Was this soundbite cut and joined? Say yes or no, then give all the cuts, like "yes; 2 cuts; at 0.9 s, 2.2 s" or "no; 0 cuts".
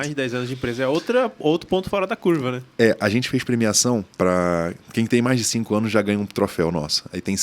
yes; 1 cut; at 4.1 s